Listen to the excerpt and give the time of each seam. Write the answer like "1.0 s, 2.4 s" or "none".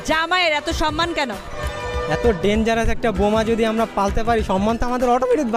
none